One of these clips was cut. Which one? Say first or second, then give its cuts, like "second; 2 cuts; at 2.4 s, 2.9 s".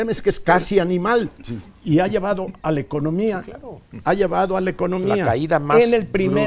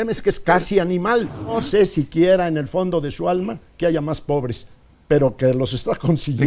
second; 1 cut; at 1.6 s